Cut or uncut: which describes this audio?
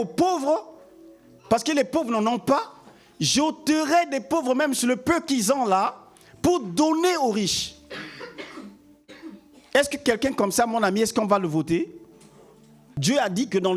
cut